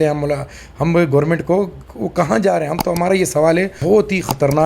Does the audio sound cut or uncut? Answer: cut